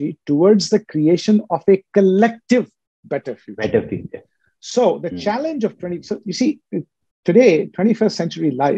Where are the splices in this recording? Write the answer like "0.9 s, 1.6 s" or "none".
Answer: none